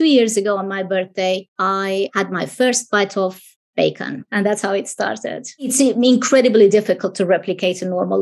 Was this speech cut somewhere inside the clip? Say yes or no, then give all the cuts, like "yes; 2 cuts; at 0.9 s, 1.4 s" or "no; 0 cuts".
yes; 3 cuts; at 2.0 s, 4.2 s, 5.7 s